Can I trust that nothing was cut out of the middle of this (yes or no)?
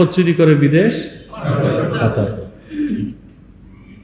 yes